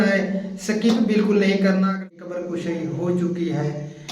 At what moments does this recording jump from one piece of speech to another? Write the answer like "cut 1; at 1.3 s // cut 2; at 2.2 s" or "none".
cut 1; at 2.0 s

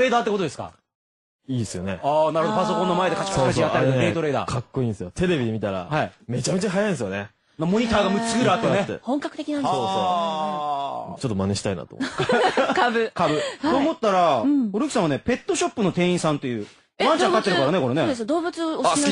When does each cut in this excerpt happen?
cut 1; at 17.9 s

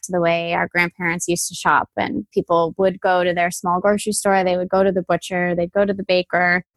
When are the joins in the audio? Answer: cut 1; at 2.3 s

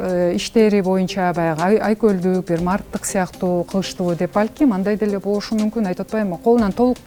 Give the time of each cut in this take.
none

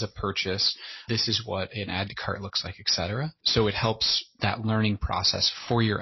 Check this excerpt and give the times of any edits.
cut 1; at 1.0 s // cut 2; at 3.4 s

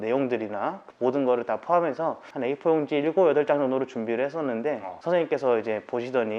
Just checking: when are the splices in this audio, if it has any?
cut 1; at 0.8 s // cut 2; at 2.3 s // cut 3; at 4.9 s

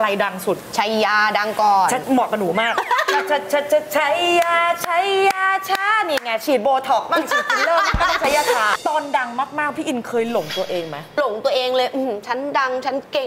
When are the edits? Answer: cut 1; at 2.0 s // cut 2; at 8.8 s // cut 3; at 11.2 s

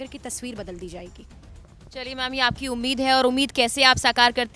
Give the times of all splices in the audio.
none

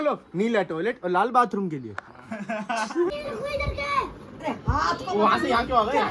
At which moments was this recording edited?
cut 1; at 3.1 s

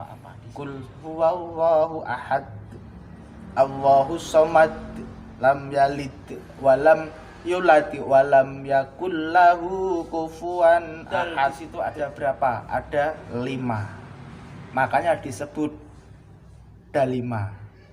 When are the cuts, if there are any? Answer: cut 1; at 11.6 s

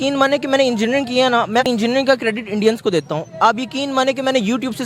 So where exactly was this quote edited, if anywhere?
cut 1; at 1.7 s

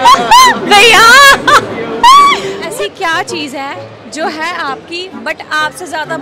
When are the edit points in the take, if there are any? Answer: cut 1; at 2.6 s

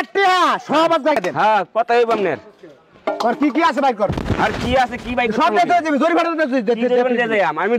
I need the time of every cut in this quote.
cut 1; at 1.1 s

